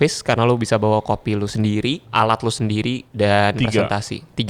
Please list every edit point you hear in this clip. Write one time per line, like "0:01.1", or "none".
0:02.1
0:03.1